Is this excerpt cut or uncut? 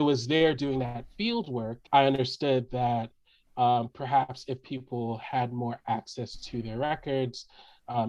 cut